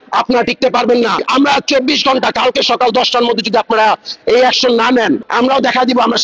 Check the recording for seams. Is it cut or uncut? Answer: cut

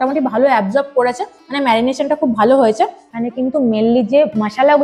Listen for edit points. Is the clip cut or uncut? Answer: cut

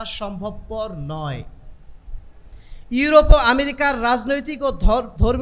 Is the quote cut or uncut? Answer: uncut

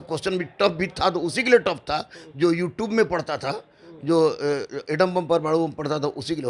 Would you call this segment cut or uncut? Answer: uncut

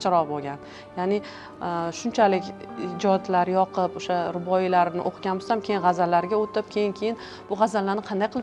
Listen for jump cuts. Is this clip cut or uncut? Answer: uncut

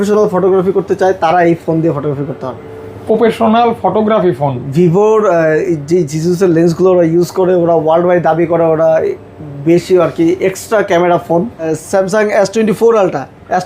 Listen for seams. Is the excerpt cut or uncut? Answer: cut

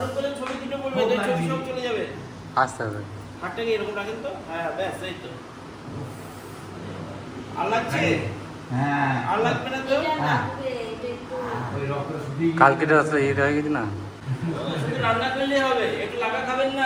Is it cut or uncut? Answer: uncut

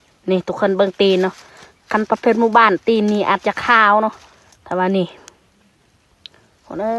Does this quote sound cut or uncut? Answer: uncut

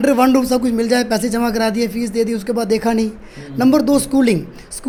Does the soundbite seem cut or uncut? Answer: uncut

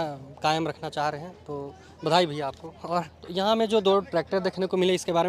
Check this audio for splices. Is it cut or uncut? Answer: uncut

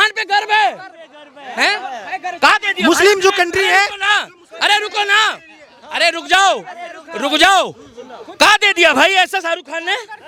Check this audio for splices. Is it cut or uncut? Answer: uncut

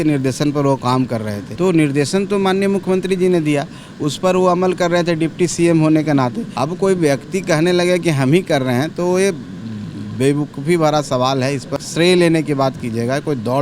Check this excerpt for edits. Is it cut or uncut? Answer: cut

